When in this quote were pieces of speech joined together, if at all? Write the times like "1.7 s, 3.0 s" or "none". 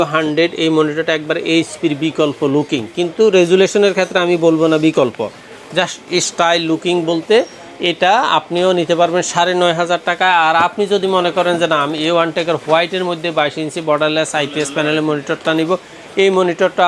none